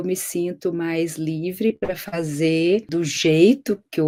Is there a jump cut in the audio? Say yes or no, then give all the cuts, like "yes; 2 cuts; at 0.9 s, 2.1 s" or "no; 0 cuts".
no; 0 cuts